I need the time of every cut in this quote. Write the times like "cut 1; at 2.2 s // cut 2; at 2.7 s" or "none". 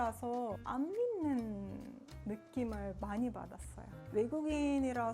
none